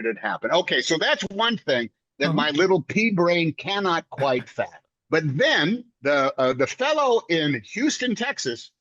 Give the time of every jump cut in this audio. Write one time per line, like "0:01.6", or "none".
none